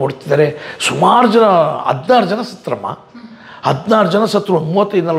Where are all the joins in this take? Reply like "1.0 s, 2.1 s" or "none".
none